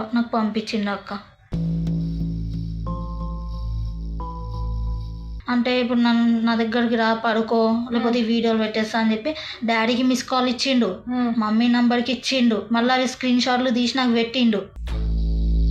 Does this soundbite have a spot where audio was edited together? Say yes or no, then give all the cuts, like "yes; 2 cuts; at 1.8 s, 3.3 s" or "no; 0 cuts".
yes; 1 cut; at 5.2 s